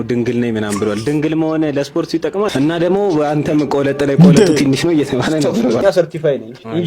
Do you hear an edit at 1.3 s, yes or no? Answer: no